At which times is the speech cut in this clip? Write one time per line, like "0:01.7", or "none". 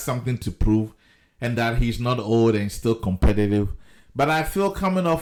none